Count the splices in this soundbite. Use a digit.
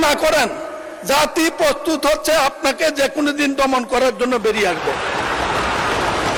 0